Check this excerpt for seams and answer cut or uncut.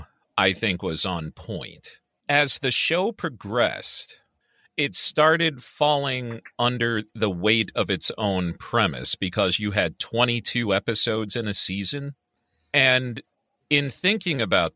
cut